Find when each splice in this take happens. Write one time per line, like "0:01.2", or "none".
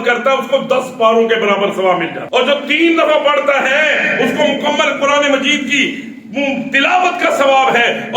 0:02.2